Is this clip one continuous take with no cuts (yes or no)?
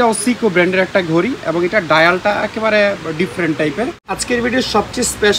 no